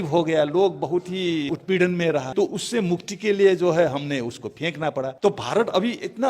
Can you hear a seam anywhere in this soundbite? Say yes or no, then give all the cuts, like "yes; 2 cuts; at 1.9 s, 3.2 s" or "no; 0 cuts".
yes; 3 cuts; at 1.5 s, 2.3 s, 5.1 s